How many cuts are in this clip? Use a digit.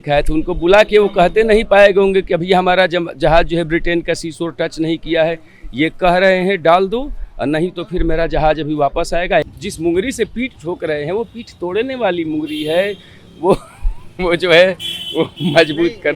1